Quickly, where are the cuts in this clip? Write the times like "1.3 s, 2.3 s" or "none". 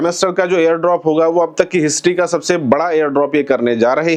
none

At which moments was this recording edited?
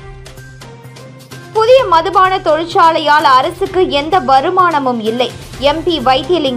1.1 s

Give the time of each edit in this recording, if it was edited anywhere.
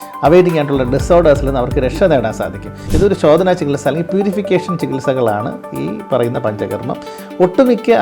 2.8 s

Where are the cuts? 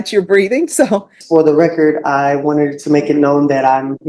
1.2 s

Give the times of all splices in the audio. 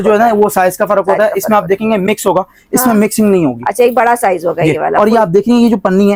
none

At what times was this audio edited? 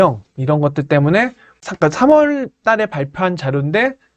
1.6 s

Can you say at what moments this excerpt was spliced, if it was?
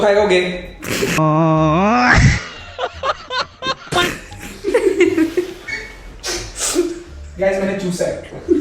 none

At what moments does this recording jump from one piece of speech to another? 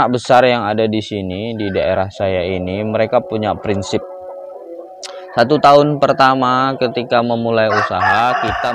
none

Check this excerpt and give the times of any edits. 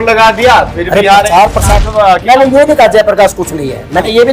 1.8 s

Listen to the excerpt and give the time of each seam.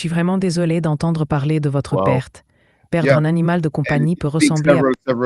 none

